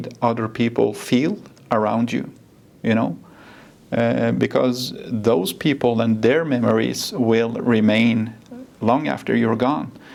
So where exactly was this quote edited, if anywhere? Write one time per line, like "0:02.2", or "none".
none